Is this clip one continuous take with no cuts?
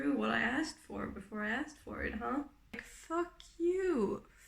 no; 1 cut; at 2.9 s

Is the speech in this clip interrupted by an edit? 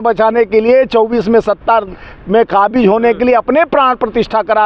no; 0 cuts

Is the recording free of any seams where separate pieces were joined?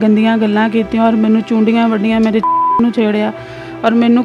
yes; 0 cuts

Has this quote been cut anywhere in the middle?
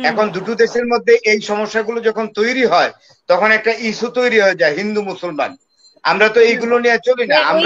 no; 0 cuts

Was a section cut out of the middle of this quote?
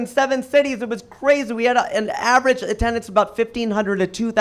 no; 0 cuts

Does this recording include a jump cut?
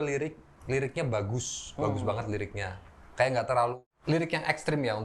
yes; 1 cut; at 3.9 s

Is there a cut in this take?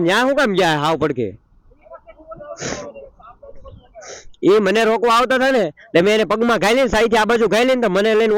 no; 0 cuts

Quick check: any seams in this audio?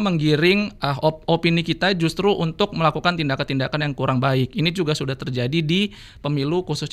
no; 0 cuts

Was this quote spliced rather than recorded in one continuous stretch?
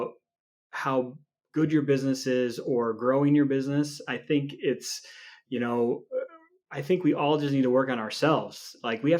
no; 0 cuts

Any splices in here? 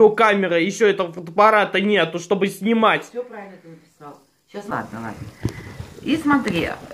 yes; 1 cut; at 4.7 s

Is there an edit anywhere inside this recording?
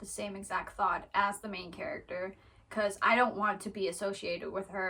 no; 0 cuts

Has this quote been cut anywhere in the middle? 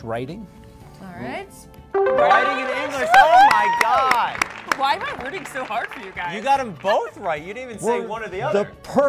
no; 0 cuts

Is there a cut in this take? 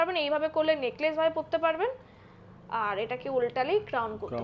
no; 0 cuts

